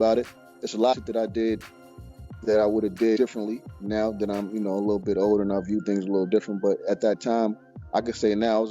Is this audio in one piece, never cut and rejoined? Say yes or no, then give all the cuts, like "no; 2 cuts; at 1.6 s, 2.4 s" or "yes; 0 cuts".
no; 1 cut; at 0.9 s